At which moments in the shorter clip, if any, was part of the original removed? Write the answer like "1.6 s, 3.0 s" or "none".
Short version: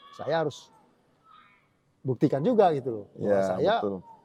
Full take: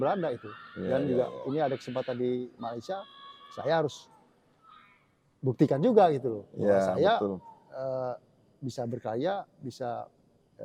none